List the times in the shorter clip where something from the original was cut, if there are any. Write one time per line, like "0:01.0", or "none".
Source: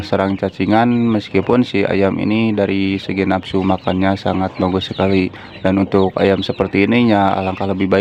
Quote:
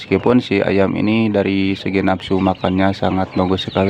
none